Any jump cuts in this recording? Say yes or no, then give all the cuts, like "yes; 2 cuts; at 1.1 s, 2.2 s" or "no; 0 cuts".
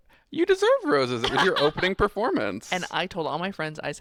no; 0 cuts